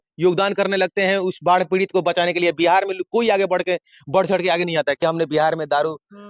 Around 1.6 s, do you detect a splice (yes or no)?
no